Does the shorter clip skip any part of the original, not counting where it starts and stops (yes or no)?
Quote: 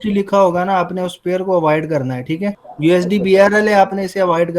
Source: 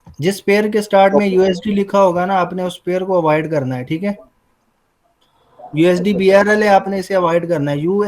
yes